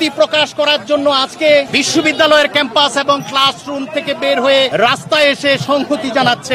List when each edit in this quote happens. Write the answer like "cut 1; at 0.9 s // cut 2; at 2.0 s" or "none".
cut 1; at 1.7 s // cut 2; at 4.7 s

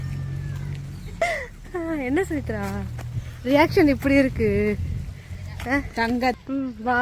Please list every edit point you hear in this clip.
cut 1; at 1.2 s // cut 2; at 5.9 s

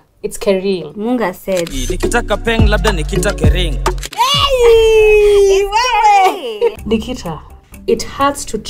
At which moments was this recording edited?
cut 1; at 6.8 s

